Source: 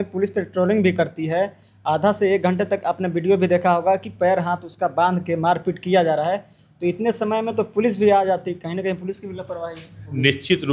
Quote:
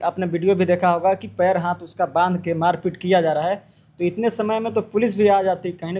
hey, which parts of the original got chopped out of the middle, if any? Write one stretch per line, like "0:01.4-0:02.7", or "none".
none